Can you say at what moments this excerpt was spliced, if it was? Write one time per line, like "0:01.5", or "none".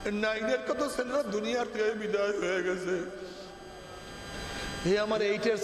none